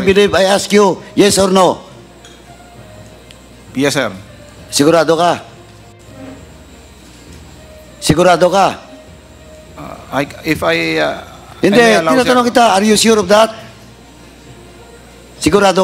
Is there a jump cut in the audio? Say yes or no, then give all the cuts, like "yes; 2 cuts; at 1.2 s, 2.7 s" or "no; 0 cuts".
no; 0 cuts